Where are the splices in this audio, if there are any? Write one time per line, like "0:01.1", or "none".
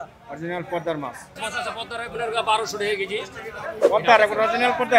0:01.5